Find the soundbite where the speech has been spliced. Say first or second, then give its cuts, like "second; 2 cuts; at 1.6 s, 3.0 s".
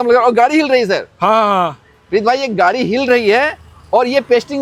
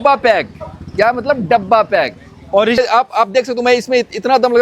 second; 1 cut; at 2.8 s